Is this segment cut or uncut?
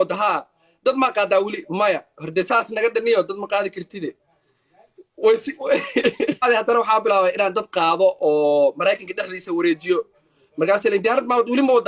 cut